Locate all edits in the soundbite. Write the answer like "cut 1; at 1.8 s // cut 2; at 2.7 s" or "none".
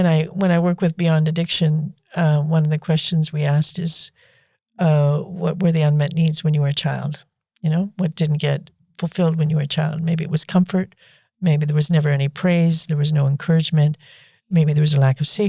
none